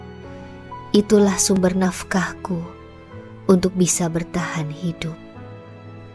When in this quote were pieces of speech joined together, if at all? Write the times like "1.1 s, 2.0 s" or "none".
0.9 s